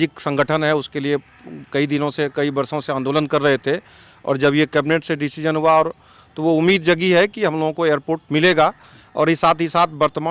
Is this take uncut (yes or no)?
yes